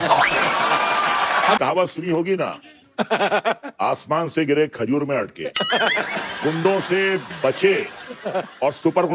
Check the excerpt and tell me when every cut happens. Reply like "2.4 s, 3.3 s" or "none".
1.6 s